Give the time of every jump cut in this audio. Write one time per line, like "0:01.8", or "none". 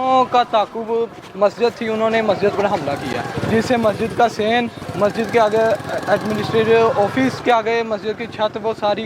0:03.3
0:04.8
0:07.4